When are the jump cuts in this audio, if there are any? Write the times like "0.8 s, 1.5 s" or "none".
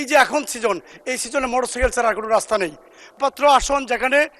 3.1 s

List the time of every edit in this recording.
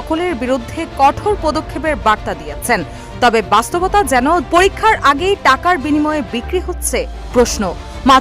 4.5 s

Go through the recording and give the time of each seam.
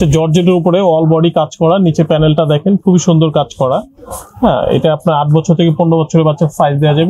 none

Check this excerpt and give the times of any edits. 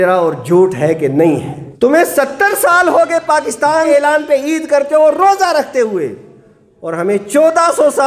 1.6 s, 3.7 s

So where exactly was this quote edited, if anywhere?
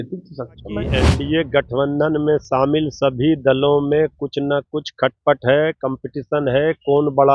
1.0 s

